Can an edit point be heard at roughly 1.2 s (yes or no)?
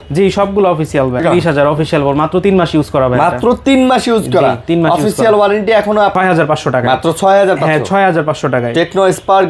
yes